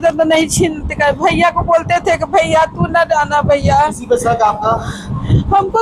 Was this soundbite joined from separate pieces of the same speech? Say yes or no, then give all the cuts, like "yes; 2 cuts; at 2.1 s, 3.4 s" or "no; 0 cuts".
no; 0 cuts